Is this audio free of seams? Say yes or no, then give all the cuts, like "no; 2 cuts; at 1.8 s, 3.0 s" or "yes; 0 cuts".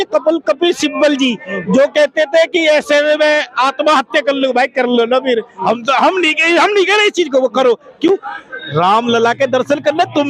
yes; 0 cuts